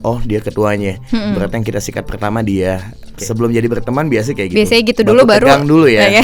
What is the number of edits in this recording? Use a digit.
1